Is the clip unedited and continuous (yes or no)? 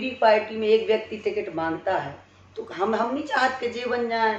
yes